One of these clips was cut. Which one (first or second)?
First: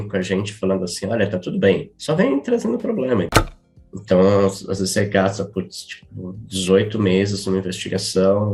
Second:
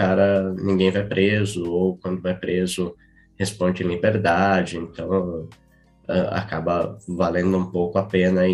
first